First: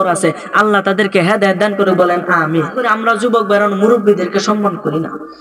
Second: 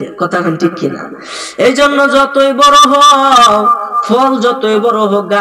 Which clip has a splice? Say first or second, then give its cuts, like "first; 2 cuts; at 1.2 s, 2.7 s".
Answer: first; 1 cut; at 2.8 s